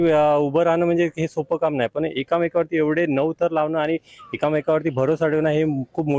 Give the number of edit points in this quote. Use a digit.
0